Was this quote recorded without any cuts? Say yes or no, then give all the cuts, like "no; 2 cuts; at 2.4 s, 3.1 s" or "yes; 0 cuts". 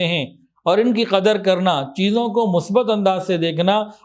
yes; 0 cuts